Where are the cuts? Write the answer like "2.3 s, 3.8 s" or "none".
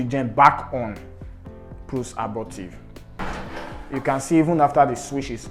3.2 s

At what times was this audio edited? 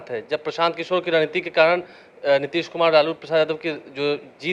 none

